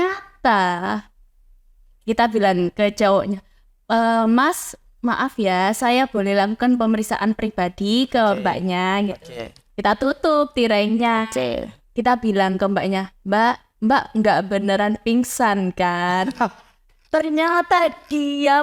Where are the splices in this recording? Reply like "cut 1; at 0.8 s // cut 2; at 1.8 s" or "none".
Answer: none